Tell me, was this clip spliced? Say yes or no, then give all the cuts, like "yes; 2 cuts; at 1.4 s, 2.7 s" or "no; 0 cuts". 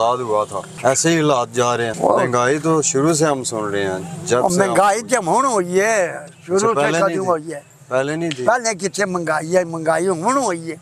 no; 0 cuts